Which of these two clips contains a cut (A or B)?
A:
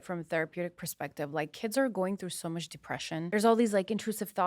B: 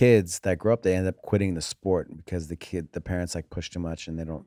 A